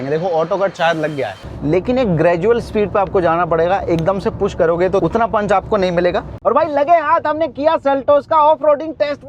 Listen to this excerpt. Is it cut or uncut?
cut